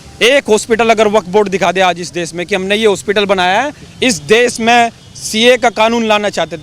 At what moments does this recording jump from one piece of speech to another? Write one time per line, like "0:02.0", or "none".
0:03.8

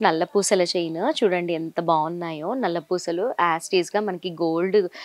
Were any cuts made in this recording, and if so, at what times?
none

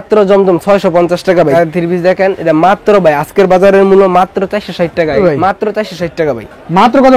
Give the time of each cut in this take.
0:01.5
0:05.2

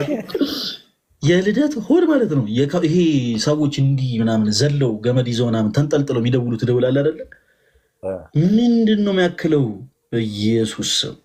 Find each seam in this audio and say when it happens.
none

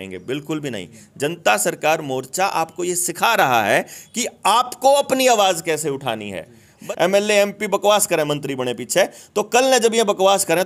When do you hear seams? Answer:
0:06.8

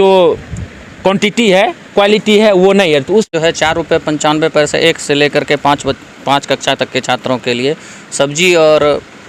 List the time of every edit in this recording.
0:03.3

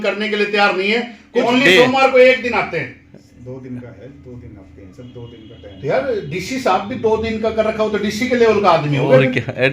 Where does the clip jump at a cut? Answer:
0:01.5

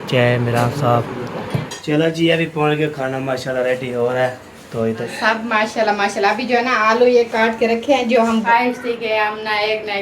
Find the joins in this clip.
0:01.6
0:05.0
0:08.4

